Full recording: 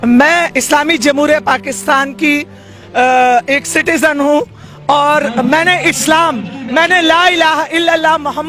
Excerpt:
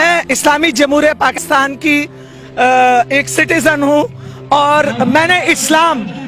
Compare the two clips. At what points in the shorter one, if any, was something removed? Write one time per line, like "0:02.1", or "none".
0:01.4